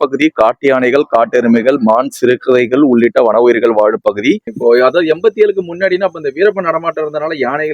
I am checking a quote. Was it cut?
yes; 1 cut; at 4.5 s

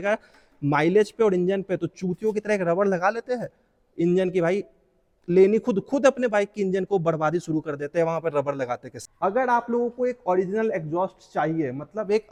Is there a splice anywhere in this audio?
no; 0 cuts

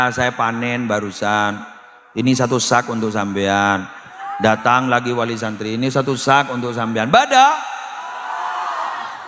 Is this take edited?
no; 0 cuts

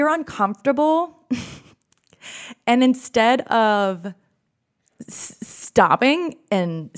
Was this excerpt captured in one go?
yes; 0 cuts

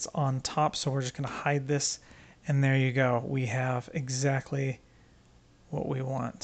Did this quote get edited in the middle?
no; 0 cuts

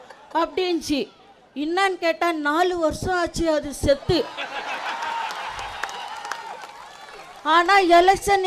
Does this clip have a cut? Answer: no; 0 cuts

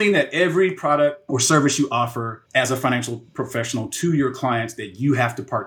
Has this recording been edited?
yes; 2 cuts; at 1.2 s, 2.3 s

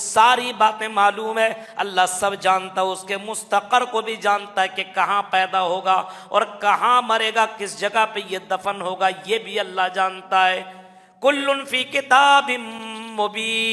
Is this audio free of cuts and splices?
yes; 0 cuts

